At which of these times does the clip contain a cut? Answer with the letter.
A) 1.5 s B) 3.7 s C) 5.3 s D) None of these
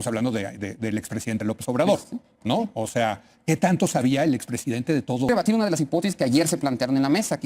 C